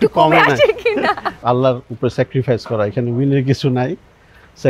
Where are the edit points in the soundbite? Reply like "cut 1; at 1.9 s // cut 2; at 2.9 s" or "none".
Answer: cut 1; at 1.4 s